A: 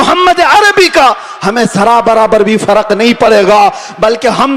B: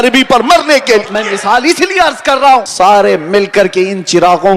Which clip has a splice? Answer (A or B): B